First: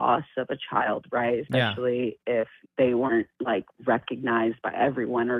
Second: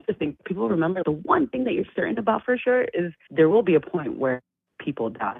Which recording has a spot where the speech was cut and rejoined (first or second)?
second